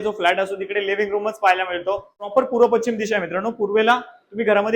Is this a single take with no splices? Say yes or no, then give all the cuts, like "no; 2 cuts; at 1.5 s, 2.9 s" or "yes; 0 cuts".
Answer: no; 1 cut; at 2.3 s